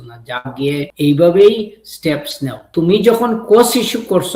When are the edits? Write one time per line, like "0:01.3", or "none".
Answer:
0:00.9
0:02.7